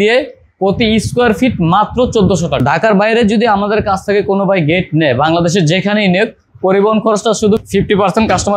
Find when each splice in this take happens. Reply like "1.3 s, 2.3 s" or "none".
2.6 s, 7.6 s